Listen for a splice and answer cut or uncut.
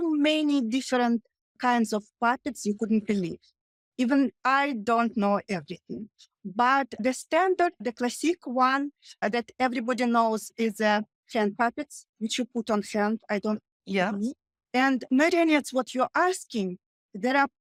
uncut